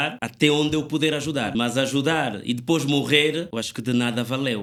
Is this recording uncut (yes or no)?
yes